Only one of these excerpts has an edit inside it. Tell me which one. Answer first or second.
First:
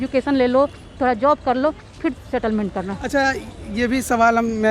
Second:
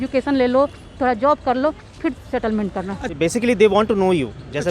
second